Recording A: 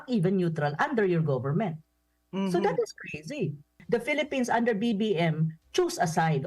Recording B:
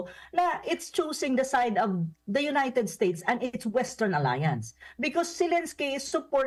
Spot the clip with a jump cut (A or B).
A